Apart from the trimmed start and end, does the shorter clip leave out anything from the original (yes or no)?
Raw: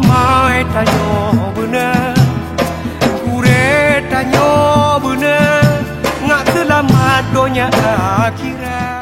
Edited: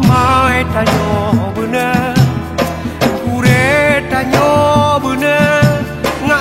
no